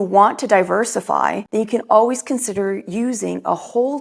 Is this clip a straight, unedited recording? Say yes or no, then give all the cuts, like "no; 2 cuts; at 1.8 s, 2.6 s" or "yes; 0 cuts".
no; 1 cut; at 1.4 s